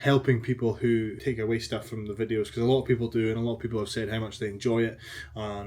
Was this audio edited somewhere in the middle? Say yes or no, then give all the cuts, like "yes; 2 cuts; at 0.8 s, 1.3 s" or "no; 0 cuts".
yes; 1 cut; at 1.2 s